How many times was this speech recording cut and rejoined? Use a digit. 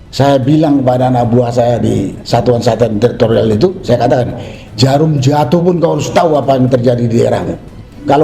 0